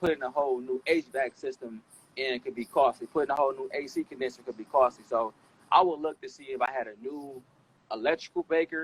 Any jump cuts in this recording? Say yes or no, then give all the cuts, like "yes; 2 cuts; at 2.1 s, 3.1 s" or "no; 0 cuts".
no; 0 cuts